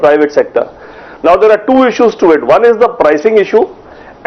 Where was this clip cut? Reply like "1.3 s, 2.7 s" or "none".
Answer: 1.1 s